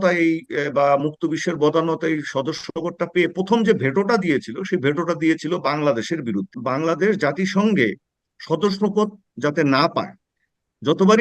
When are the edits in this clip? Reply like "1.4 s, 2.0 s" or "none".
6.5 s